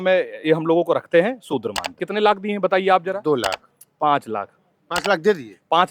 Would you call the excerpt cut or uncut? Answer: cut